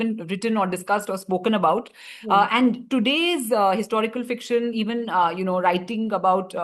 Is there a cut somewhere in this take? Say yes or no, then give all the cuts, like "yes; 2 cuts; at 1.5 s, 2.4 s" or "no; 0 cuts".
no; 0 cuts